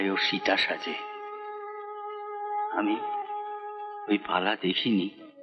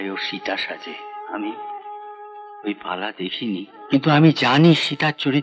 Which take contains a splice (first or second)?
second